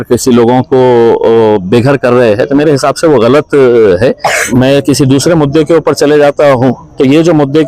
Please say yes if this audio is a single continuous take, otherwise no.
no